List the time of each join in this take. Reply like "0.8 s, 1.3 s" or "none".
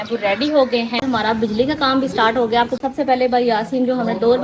1.0 s, 2.8 s